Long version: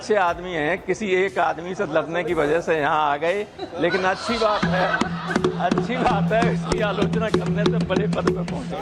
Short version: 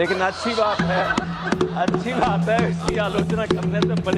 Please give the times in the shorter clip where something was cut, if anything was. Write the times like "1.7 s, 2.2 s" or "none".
none